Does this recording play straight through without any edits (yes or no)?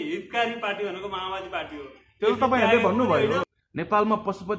no